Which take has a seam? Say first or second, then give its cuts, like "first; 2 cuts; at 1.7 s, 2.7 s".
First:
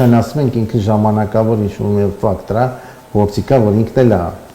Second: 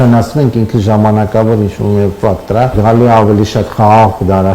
second; 1 cut; at 2.7 s